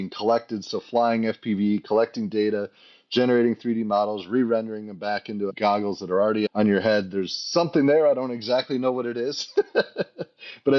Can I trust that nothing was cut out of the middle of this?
yes; 0 cuts

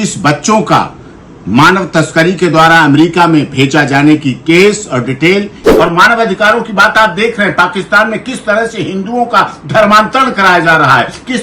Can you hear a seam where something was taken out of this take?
yes; 1 cut; at 5.6 s

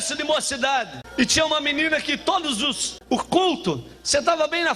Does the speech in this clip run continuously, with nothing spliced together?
no; 2 cuts; at 1.0 s, 2.9 s

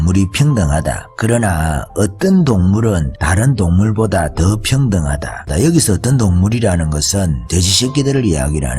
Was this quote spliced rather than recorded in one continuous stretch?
yes; 3 cuts; at 3.2 s, 5.5 s, 7.4 s

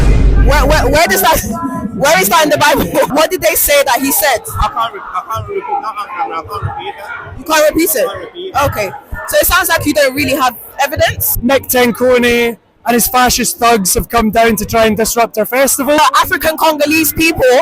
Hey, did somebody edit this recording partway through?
yes; 3 cuts; at 3.1 s, 11.3 s, 16.0 s

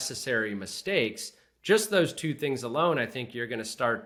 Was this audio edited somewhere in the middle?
no; 0 cuts

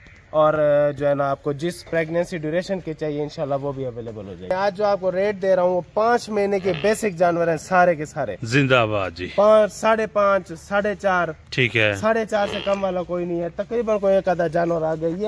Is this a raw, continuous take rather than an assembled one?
no; 1 cut; at 4.5 s

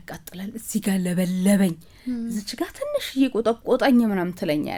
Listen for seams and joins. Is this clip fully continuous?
yes; 0 cuts

